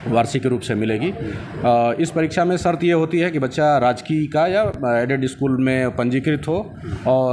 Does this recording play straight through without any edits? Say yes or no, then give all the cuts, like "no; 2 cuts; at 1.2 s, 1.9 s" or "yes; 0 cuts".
yes; 0 cuts